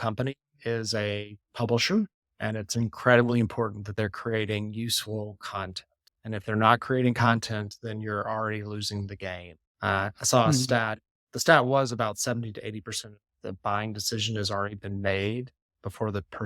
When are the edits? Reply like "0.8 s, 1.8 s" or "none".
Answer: none